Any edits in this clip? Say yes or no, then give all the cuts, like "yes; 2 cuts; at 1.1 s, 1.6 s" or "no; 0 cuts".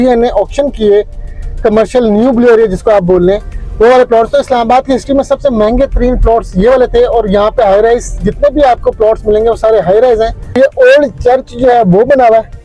yes; 1 cut; at 10.5 s